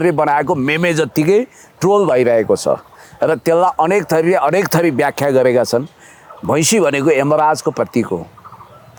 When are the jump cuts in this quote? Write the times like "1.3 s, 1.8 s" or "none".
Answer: none